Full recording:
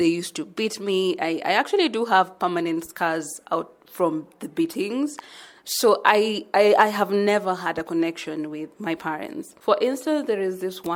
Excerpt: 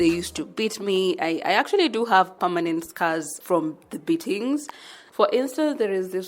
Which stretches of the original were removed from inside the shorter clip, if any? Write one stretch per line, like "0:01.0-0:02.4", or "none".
0:03.3-0:03.8
0:05.4-0:09.4